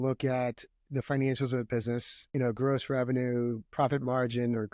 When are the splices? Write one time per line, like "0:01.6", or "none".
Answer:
0:02.2